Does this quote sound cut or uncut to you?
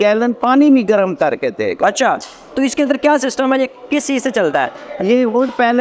uncut